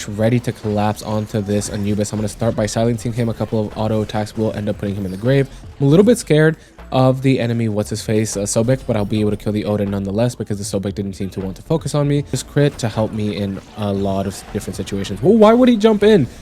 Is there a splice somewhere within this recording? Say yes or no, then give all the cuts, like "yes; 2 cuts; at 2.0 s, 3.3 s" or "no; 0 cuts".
yes; 1 cut; at 12.4 s